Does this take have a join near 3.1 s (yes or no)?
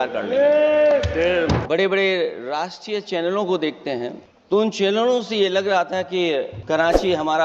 no